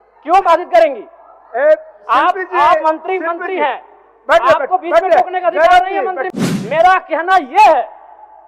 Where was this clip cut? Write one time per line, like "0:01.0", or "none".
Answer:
0:06.2